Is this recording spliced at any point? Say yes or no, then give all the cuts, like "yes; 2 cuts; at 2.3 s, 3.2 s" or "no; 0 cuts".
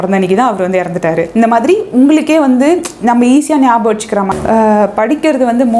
yes; 1 cut; at 4.3 s